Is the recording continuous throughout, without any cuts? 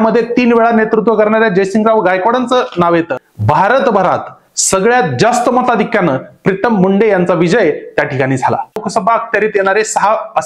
no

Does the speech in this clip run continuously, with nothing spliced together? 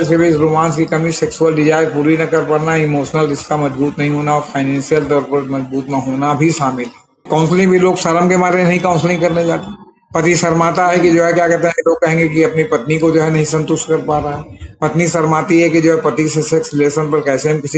no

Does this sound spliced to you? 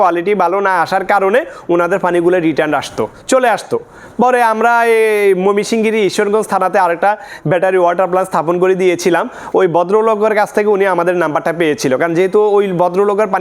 no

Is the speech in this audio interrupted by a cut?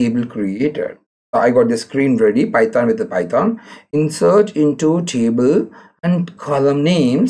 no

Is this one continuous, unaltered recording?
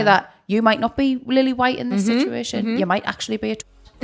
yes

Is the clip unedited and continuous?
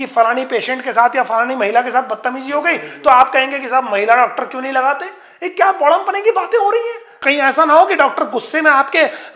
no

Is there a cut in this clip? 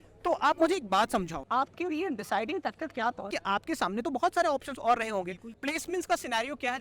yes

